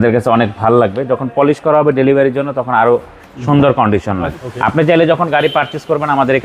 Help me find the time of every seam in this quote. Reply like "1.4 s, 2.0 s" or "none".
4.3 s